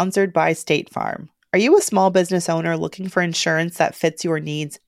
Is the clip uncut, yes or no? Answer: yes